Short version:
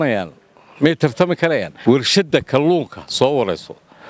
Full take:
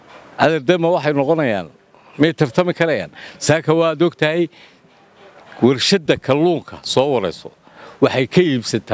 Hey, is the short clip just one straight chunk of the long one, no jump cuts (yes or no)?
no